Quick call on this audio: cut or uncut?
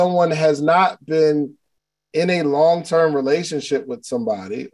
uncut